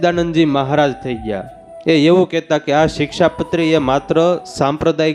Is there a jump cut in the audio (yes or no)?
no